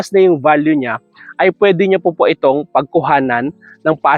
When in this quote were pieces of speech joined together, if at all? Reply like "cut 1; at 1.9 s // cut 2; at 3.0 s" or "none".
none